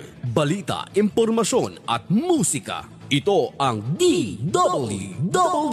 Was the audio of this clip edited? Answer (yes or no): no